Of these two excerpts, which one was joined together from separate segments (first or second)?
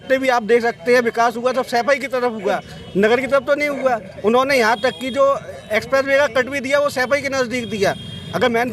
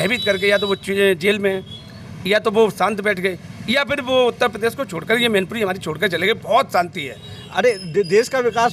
second